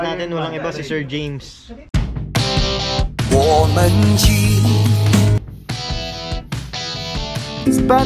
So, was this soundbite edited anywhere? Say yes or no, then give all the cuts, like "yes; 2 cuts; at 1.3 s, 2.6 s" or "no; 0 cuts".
no; 0 cuts